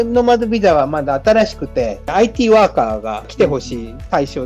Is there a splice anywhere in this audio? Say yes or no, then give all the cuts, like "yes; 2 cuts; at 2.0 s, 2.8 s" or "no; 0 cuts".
yes; 1 cut; at 2.1 s